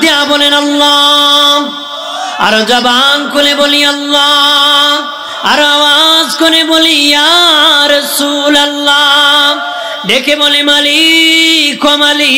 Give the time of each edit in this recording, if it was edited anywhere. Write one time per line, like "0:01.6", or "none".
none